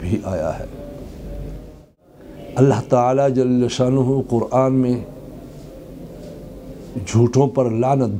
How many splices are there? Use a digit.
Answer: 1